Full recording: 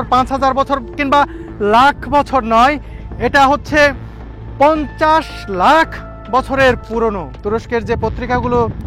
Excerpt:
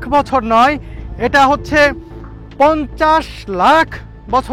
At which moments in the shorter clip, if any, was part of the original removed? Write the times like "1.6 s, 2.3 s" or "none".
none

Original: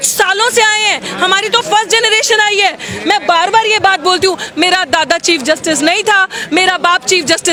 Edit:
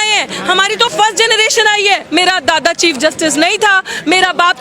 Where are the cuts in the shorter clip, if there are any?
2.0 s

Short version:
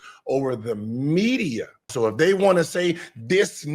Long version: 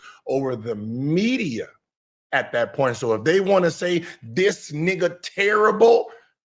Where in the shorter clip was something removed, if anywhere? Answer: 1.9 s

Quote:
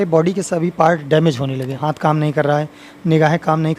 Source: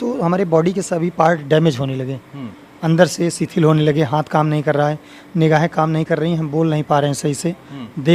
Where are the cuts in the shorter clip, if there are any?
1.8 s

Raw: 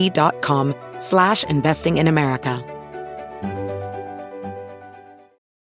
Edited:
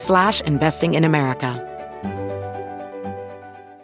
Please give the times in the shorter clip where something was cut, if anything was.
1.6 s

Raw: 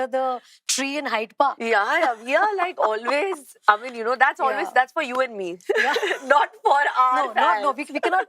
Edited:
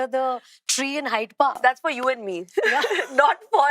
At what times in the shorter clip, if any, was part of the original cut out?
1.6 s

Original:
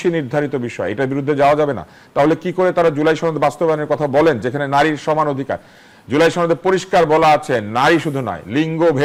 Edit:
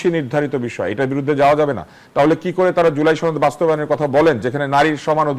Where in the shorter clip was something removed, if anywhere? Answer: none

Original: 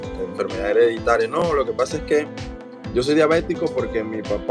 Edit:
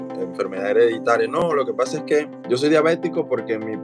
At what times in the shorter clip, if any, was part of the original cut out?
2.4 s

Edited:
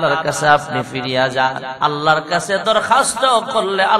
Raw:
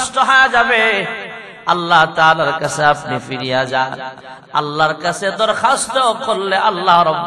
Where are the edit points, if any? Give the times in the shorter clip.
1.7 s

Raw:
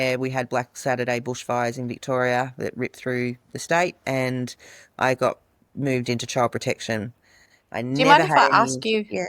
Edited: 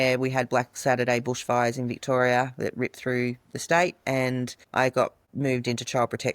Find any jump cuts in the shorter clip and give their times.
4.6 s, 5.2 s

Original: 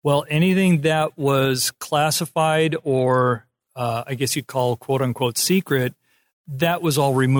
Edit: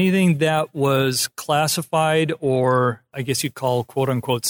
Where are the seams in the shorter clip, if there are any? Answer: 3.1 s

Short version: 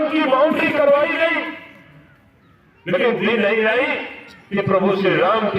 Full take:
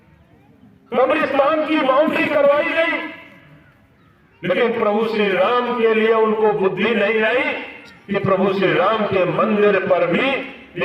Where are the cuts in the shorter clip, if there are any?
3.2 s

